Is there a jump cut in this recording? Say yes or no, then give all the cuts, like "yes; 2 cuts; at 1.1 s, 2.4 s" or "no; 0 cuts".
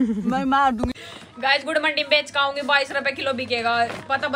yes; 1 cut; at 1.0 s